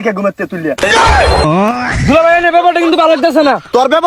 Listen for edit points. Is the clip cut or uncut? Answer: uncut